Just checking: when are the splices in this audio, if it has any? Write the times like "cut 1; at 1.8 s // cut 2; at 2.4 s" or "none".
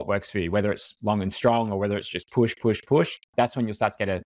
cut 1; at 3.2 s